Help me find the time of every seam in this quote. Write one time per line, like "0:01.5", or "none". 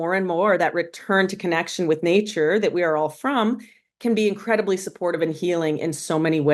none